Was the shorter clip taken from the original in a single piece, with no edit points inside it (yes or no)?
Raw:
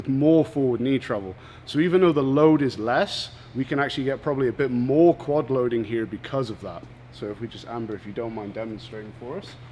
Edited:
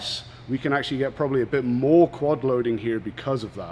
yes